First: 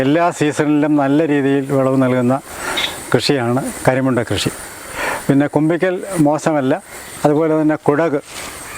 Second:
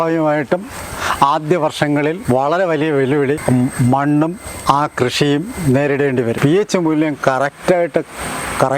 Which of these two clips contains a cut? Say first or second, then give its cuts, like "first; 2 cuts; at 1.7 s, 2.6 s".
second; 3 cuts; at 2.2 s, 3.4 s, 6.4 s